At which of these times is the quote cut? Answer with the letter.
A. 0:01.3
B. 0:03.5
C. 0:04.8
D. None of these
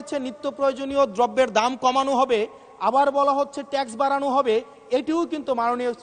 D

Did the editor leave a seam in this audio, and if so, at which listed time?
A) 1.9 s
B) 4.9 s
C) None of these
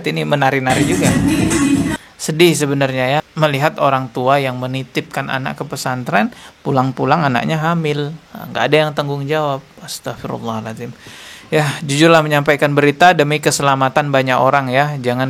A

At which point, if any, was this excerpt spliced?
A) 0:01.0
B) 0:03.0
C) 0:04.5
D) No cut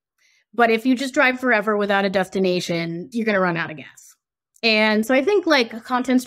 B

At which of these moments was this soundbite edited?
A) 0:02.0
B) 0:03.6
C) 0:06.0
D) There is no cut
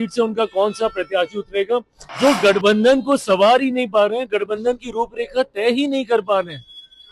A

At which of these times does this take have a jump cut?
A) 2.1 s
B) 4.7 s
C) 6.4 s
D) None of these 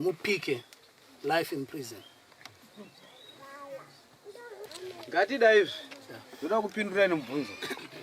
B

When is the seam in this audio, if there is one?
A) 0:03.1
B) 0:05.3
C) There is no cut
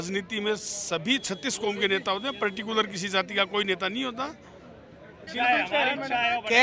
B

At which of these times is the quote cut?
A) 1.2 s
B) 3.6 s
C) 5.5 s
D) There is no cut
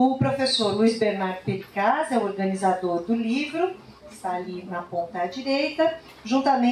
C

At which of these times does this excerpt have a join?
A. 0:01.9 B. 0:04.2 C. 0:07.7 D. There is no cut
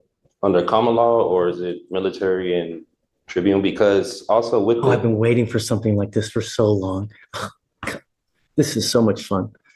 D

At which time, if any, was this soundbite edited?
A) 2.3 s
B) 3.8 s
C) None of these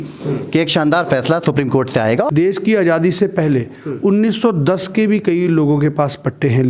A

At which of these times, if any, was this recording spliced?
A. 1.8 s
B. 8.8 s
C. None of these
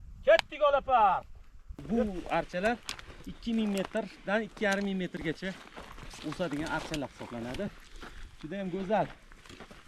A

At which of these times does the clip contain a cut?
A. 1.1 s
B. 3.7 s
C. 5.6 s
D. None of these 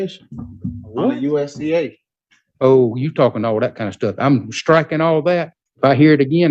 C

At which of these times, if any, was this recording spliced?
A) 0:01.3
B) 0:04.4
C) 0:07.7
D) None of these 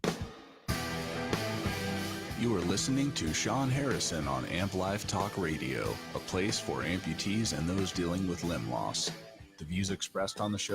A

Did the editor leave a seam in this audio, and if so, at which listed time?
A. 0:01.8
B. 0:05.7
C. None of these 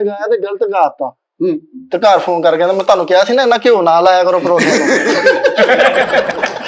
C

